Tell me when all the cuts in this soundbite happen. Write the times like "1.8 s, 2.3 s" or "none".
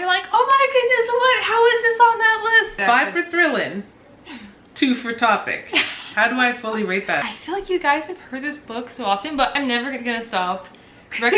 2.8 s, 7.2 s, 9.5 s